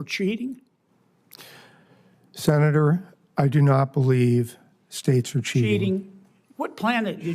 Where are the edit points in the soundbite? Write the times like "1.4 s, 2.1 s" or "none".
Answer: 5.7 s